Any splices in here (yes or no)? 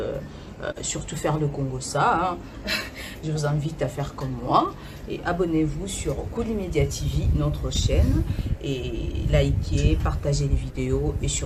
no